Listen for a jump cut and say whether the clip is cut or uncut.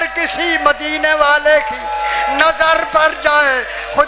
uncut